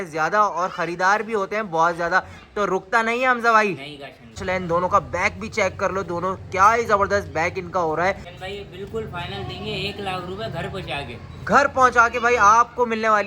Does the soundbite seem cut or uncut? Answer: cut